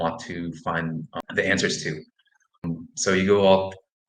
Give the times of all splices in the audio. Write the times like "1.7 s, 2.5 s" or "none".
1.1 s, 2.6 s